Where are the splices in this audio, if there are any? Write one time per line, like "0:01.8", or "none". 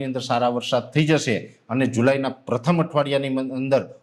none